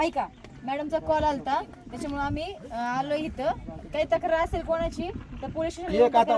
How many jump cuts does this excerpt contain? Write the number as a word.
zero